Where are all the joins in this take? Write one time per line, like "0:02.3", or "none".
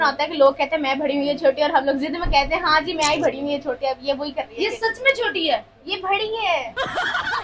none